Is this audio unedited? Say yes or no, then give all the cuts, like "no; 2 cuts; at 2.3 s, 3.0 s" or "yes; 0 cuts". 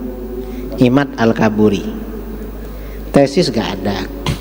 yes; 0 cuts